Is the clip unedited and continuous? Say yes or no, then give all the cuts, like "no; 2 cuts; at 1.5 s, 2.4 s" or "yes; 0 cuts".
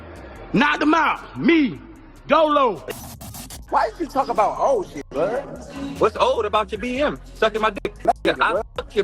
no; 2 cuts; at 3.4 s, 8.0 s